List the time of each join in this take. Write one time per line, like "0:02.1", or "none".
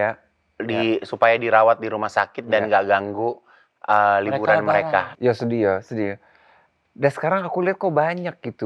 0:05.1